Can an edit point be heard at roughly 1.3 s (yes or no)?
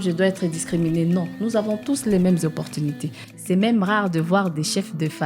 no